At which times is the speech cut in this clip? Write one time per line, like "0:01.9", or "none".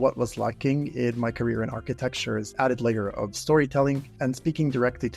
0:02.5
0:04.1